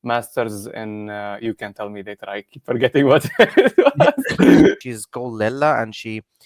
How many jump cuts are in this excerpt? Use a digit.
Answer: 1